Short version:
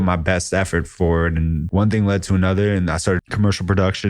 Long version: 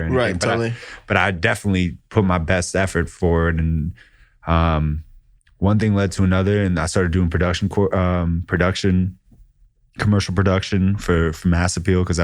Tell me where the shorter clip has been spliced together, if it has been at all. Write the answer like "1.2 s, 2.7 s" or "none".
1.6 s, 3.2 s

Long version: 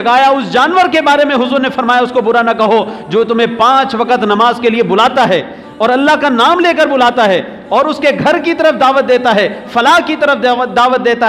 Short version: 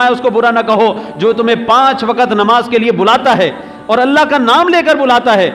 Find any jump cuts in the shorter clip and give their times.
none

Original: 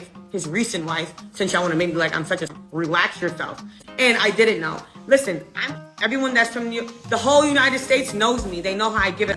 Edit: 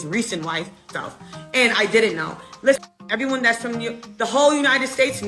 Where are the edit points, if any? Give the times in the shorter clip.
0.9 s, 2.8 s

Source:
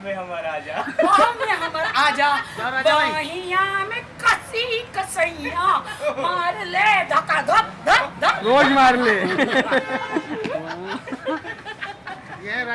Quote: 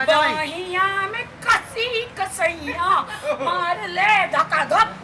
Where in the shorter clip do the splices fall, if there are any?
none

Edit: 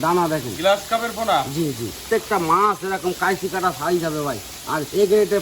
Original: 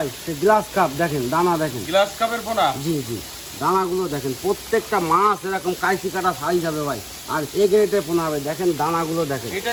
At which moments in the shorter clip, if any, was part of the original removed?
2.0 s

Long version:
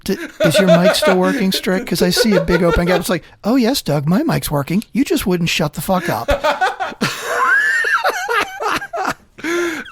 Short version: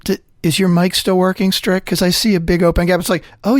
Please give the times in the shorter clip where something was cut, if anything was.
none

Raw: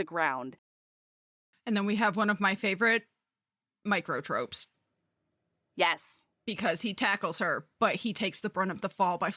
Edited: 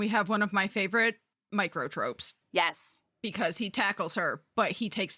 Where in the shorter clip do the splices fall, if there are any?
1.3 s, 2.3 s

